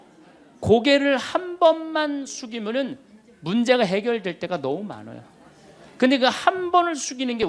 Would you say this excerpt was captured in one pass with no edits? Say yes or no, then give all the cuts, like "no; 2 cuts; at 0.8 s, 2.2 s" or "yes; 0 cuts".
yes; 0 cuts